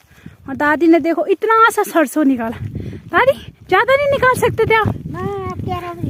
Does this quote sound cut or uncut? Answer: uncut